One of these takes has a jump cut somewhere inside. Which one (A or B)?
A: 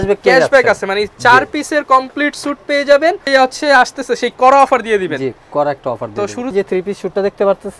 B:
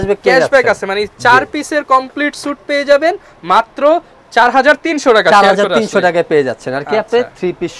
A